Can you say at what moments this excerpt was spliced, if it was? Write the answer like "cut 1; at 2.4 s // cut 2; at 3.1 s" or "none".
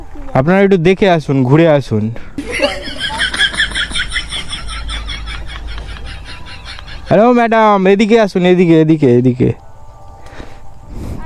none